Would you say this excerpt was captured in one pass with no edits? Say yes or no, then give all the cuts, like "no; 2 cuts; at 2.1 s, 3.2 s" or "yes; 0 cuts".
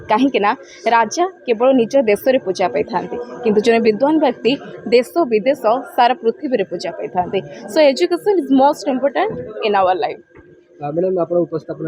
yes; 0 cuts